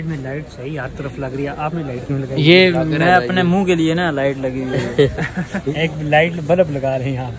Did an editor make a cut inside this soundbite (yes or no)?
yes